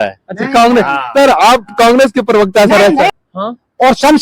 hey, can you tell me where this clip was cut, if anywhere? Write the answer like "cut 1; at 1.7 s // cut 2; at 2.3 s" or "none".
cut 1; at 3.1 s